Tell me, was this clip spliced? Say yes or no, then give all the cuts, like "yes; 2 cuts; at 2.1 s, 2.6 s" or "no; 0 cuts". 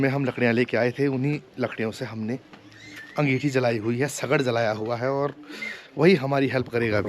no; 0 cuts